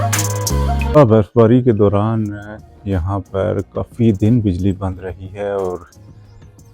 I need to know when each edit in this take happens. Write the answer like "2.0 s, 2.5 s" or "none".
1.0 s